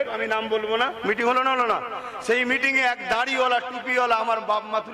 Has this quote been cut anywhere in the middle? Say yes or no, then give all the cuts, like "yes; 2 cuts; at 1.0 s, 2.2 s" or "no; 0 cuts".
no; 0 cuts